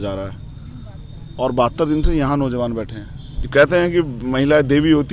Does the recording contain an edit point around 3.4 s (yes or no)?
yes